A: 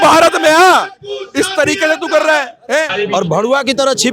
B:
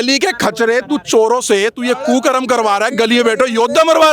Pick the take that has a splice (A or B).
A